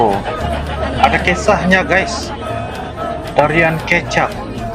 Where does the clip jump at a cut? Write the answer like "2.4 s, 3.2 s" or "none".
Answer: none